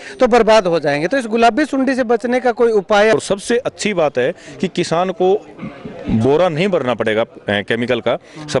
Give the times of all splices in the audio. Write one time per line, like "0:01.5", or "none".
0:03.1